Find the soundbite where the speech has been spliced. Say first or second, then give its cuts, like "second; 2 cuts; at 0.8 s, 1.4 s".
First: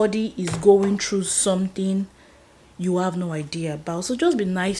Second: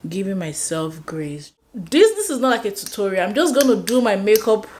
second; 1 cut; at 1.5 s